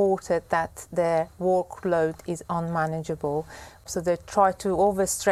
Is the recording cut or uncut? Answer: cut